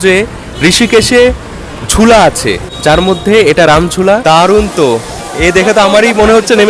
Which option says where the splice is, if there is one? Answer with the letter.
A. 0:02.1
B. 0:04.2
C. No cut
B